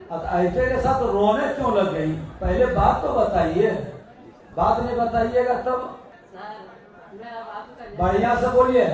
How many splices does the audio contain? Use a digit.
1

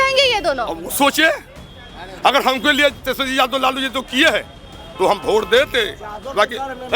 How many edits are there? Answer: 0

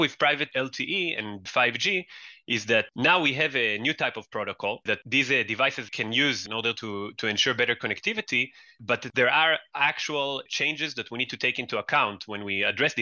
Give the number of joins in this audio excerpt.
2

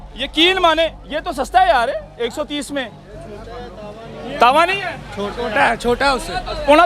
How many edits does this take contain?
0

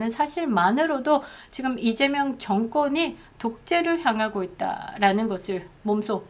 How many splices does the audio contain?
0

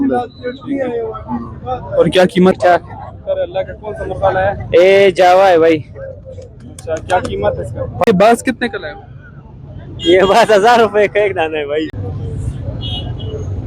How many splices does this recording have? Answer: 3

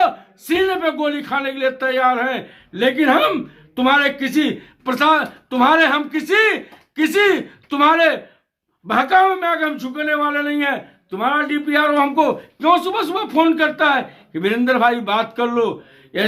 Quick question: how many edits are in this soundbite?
0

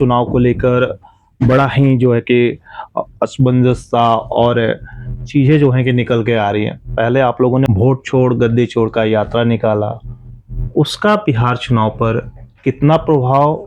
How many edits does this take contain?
1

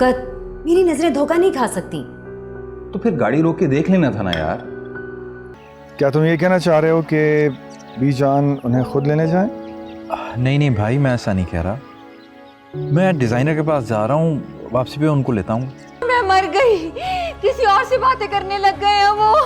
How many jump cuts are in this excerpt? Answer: 2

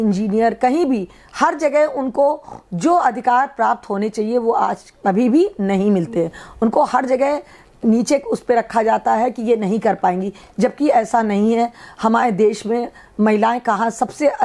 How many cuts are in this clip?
0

